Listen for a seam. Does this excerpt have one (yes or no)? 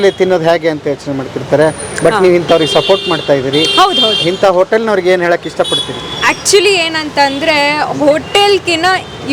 no